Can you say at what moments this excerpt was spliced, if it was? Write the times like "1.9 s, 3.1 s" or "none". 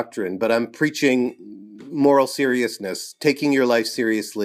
none